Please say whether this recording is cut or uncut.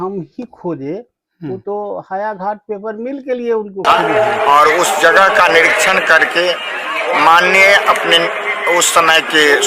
cut